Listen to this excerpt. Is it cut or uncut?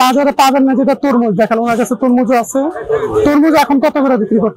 uncut